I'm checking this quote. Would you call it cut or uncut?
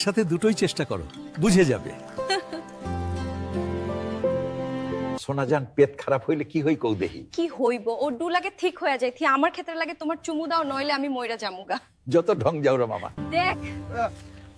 uncut